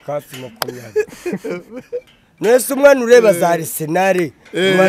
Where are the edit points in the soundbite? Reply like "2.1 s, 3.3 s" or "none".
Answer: none